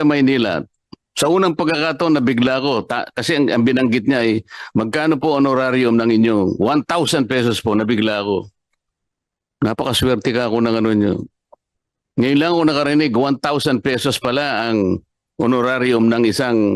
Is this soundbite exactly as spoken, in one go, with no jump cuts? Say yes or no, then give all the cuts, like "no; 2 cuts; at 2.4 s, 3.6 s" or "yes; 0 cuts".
yes; 0 cuts